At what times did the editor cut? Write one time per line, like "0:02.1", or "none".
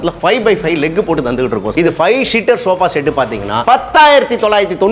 0:01.7